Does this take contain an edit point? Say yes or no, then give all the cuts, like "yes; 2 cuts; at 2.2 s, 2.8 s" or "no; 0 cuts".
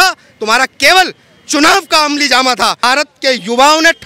yes; 1 cut; at 2.8 s